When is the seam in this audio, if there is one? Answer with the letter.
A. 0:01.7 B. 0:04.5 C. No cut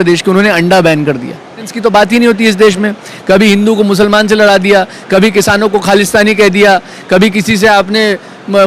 A